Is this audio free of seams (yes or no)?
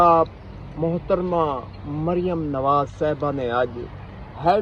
yes